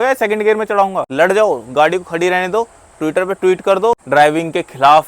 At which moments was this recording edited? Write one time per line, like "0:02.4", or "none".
0:01.0
0:04.0

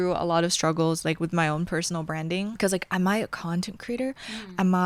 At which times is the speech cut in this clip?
none

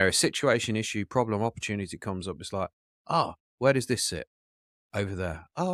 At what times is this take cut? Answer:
none

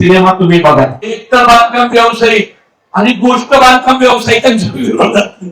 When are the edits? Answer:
0:01.2

